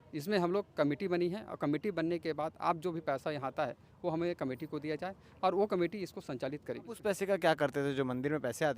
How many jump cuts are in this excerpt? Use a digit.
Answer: 1